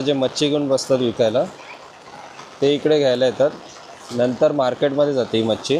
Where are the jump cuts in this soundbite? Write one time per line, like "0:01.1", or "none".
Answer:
none